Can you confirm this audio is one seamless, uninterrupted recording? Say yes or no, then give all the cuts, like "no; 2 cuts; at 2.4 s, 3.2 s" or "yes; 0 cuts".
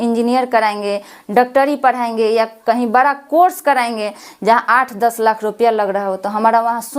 yes; 0 cuts